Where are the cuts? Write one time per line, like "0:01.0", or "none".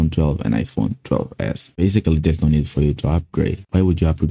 0:01.6